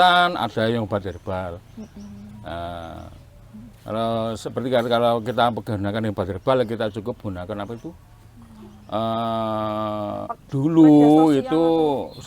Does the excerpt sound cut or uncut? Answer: cut